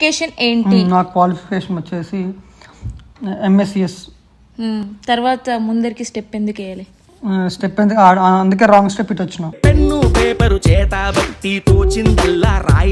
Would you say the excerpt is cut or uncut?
uncut